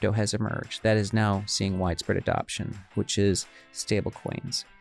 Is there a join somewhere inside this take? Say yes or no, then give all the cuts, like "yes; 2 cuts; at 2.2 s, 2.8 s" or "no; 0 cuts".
no; 0 cuts